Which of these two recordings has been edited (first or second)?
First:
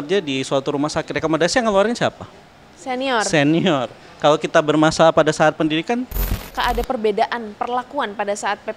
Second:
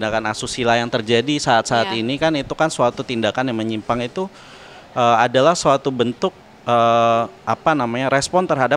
first